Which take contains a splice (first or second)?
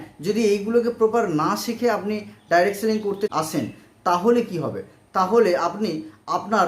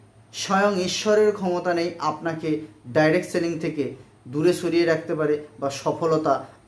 first